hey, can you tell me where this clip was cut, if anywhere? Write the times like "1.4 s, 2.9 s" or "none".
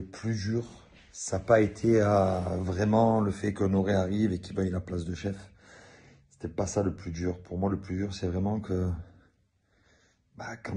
4.9 s